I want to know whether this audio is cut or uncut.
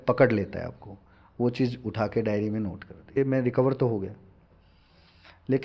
cut